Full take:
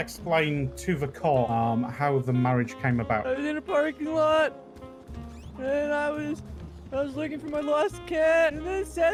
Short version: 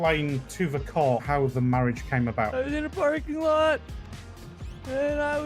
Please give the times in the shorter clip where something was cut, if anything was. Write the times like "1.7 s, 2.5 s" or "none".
1.2 s